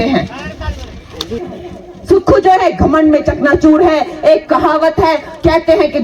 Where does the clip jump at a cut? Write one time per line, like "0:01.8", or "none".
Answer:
0:01.6